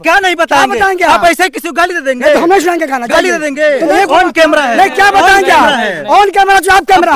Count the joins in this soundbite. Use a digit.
1